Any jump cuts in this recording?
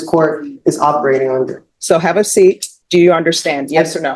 yes; 2 cuts; at 1.7 s, 2.7 s

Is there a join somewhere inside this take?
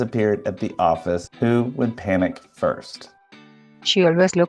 yes; 1 cut; at 3.2 s

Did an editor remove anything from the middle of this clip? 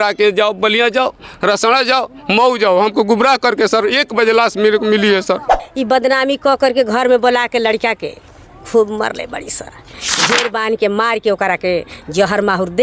yes; 2 cuts; at 5.7 s, 10.0 s

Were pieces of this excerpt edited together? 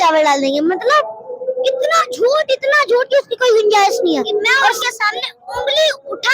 yes; 1 cut; at 4.8 s

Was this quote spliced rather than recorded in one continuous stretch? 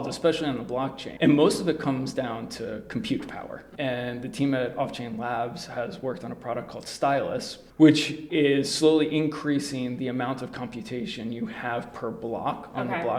yes; 3 cuts; at 1.0 s, 3.6 s, 8.2 s

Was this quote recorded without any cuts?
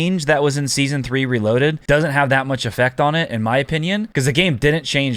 no; 2 cuts; at 1.8 s, 4.1 s

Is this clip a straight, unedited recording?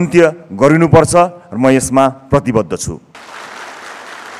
no; 1 cut; at 3.2 s

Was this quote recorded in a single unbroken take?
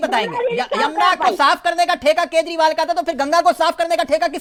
yes; 0 cuts

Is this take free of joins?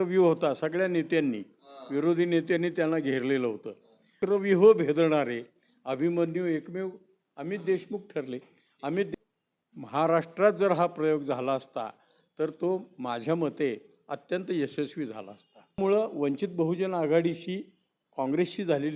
no; 3 cuts; at 4.2 s, 9.1 s, 15.8 s

